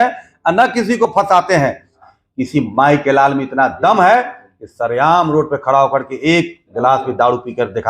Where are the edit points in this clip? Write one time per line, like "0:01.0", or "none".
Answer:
0:02.1

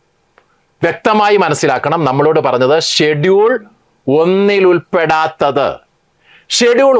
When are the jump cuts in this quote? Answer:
none

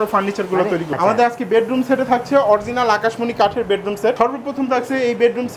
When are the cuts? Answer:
0:01.0
0:04.2

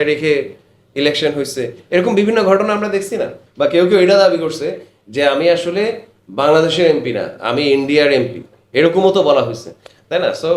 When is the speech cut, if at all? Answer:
0:03.4

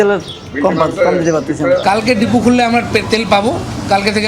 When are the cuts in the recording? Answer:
0:01.8

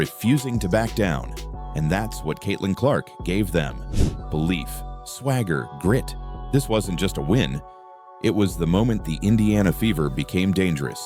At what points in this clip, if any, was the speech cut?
none

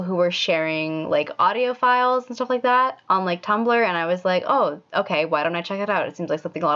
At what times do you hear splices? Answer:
none

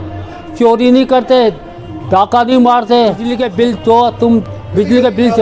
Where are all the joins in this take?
0:03.3

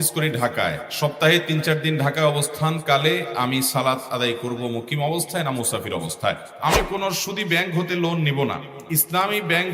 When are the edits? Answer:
0:06.5
0:08.7

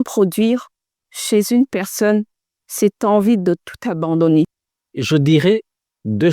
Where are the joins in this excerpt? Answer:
0:04.9

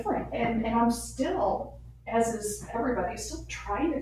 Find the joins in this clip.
none

